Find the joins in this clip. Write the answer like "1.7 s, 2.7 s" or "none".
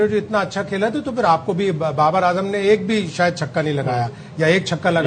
none

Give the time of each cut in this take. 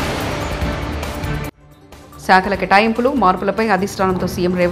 1.2 s

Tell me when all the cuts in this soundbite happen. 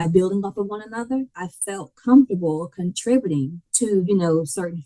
1.4 s, 3.6 s

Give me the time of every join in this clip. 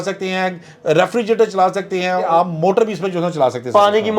2.3 s

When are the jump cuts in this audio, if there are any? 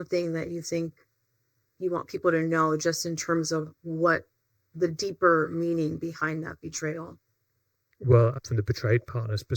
8.4 s

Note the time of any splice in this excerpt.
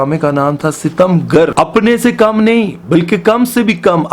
1.5 s

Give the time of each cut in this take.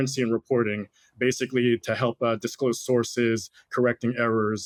none

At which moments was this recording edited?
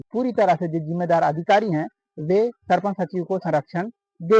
none

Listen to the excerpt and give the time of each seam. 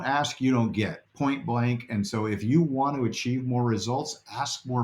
1.0 s

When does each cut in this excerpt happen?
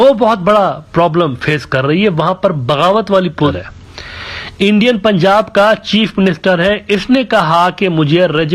3.6 s

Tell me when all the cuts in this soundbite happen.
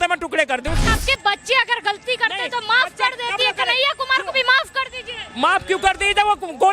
1.0 s

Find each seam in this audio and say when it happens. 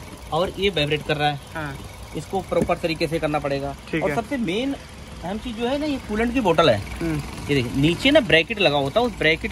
none

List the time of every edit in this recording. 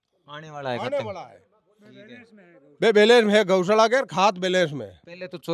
none

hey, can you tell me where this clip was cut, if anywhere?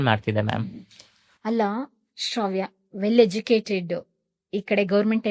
none

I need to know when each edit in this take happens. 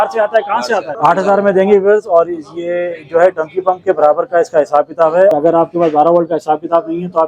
0.9 s, 5.3 s

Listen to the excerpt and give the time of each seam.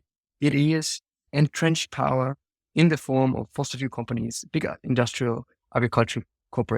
1.2 s

